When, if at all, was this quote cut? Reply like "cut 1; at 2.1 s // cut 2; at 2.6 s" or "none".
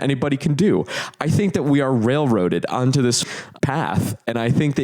cut 1; at 3.2 s